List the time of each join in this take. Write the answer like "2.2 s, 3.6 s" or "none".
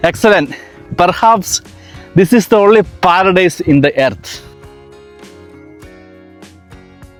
none